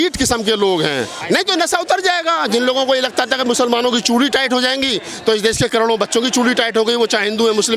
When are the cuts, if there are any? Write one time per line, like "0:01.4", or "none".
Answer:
0:01.2

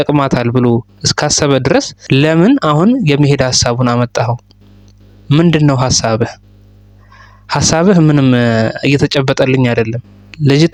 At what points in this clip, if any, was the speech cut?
none

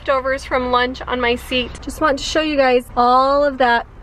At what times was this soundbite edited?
0:01.8
0:02.9

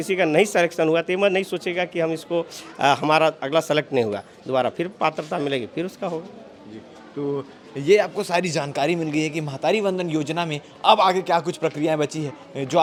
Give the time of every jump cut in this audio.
none

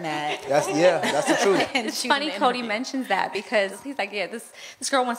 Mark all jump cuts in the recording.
0:01.7
0:03.8

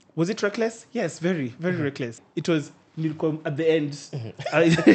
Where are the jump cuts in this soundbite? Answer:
0:02.2

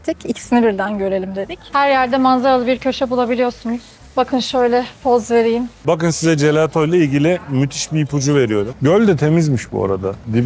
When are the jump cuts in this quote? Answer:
0:01.7
0:05.7
0:08.7

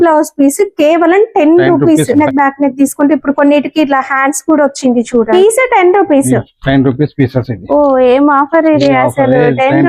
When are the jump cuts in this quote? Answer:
0:02.1
0:05.3

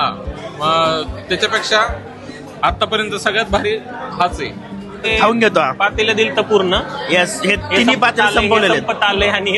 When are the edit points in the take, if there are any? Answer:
0:05.1

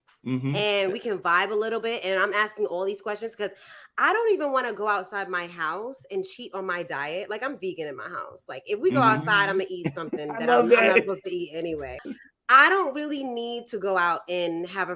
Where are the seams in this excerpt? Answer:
0:12.0

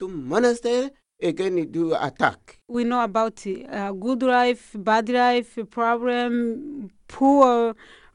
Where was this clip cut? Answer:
0:01.0
0:02.5

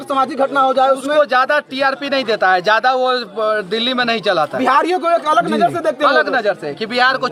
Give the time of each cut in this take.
none

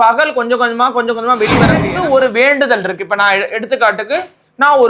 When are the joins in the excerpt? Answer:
0:01.8

